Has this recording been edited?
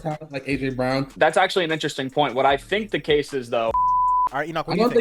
yes; 2 cuts; at 1.1 s, 3.9 s

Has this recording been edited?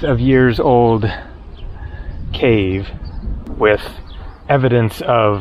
yes; 1 cut; at 3.4 s

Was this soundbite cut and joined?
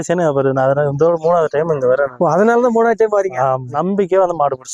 yes; 2 cuts; at 2.1 s, 3.7 s

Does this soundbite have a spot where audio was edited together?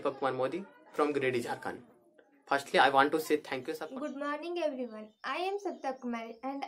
yes; 1 cut; at 3.6 s

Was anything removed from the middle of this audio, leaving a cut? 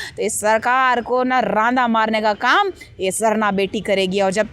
no; 0 cuts

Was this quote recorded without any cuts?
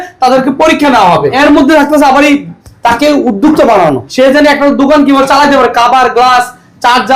no; 2 cuts; at 1.4 s, 4.0 s

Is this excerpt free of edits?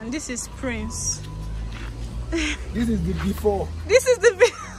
yes; 0 cuts

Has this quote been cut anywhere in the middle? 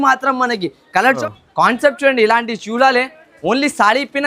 yes; 1 cut; at 1.2 s

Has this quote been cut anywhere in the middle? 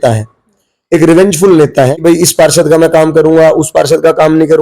yes; 1 cut; at 1.9 s

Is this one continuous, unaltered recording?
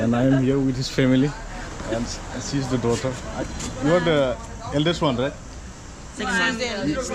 yes; 0 cuts

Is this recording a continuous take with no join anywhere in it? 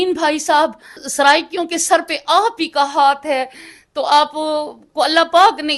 no; 1 cut; at 1.0 s

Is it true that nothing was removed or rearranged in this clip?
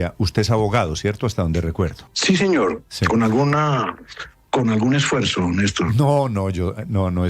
no; 1 cut; at 2.1 s

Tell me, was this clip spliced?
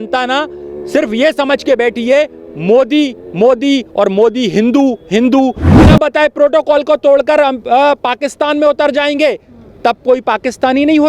yes; 1 cut; at 5.6 s

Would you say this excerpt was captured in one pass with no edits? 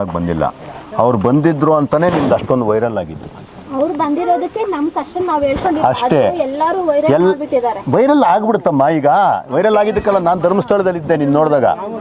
yes; 0 cuts

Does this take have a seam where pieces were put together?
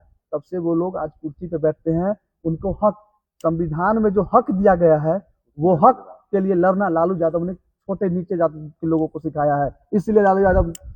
no; 0 cuts

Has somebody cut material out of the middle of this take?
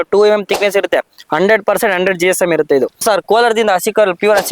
yes; 1 cut; at 3.0 s

